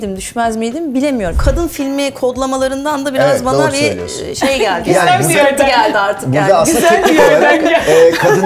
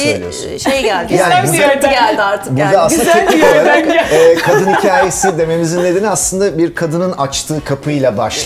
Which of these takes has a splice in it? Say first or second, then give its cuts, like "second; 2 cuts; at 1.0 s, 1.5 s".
first; 1 cut; at 1.4 s